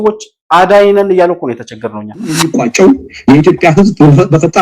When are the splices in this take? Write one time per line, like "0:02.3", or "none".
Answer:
0:02.4